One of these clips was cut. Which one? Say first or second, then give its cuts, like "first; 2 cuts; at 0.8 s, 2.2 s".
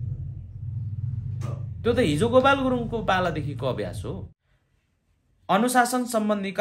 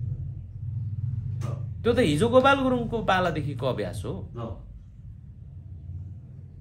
first; 1 cut; at 4.3 s